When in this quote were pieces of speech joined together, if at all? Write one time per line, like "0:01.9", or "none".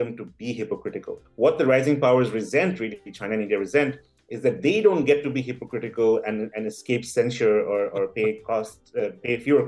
0:01.2